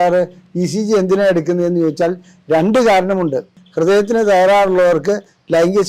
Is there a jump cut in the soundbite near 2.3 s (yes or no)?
no